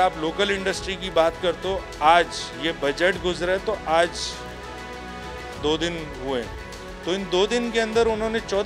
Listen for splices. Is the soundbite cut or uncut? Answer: cut